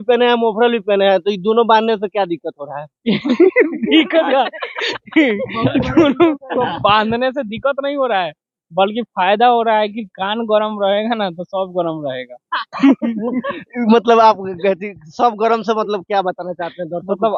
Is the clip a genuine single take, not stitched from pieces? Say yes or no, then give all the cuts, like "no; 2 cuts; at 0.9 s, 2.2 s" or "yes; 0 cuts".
yes; 0 cuts